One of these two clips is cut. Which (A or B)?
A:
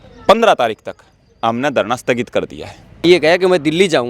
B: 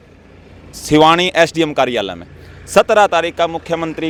A